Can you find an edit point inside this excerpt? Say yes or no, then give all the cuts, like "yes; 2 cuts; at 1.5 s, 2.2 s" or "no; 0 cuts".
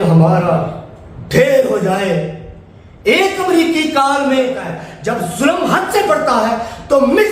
yes; 1 cut; at 4.9 s